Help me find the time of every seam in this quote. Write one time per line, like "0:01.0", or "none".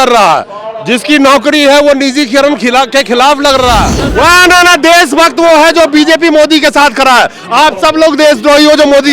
0:04.0